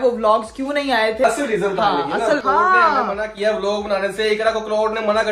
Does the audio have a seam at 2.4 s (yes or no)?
yes